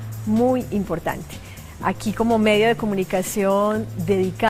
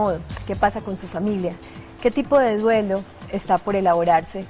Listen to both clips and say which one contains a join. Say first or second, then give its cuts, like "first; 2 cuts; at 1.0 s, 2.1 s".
second; 1 cut; at 1.1 s